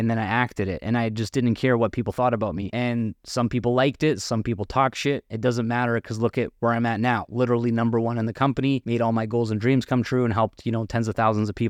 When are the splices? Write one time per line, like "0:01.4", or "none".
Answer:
0:02.6
0:08.8